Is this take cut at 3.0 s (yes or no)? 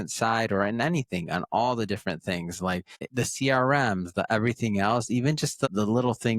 yes